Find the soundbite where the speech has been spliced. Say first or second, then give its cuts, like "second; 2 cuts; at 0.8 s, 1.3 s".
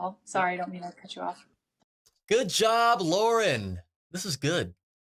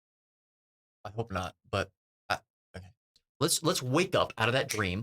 second; 1 cut; at 3.1 s